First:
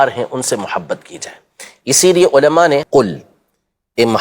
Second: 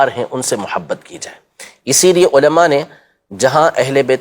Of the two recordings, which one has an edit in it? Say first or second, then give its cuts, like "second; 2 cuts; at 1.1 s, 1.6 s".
first; 1 cut; at 2.9 s